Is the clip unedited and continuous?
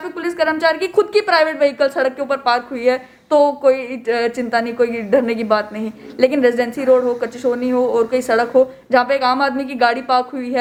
yes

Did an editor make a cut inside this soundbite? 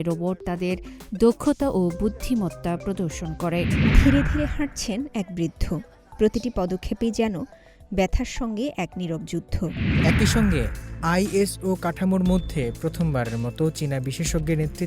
yes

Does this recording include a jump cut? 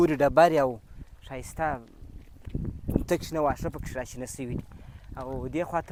no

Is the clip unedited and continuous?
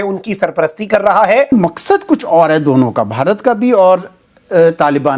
no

